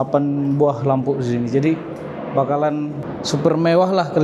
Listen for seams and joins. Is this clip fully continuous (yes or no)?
no